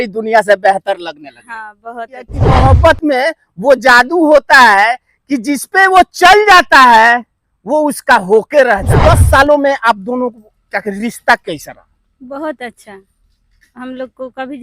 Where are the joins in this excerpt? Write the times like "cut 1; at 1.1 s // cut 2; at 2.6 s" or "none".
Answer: cut 1; at 2.6 s // cut 2; at 8.9 s

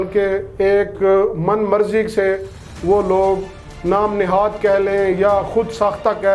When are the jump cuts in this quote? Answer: none

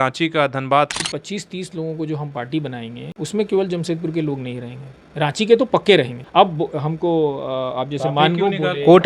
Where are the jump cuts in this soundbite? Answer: cut 1; at 0.9 s // cut 2; at 3.0 s // cut 3; at 6.2 s

